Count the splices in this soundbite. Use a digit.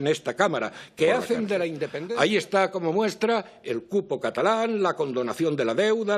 1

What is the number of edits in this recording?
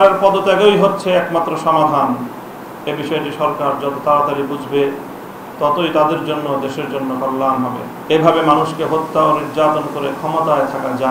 1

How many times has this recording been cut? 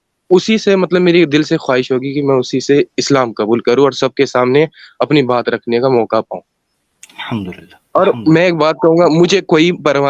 0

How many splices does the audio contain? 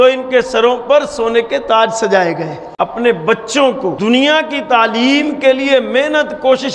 2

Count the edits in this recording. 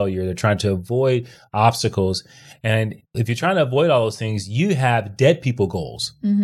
1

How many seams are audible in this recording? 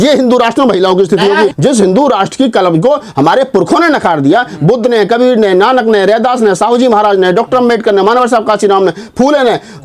1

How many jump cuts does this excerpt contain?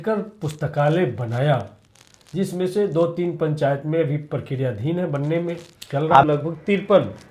1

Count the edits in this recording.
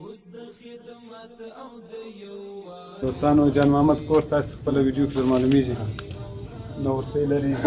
1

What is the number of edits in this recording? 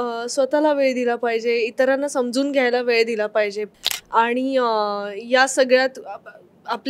1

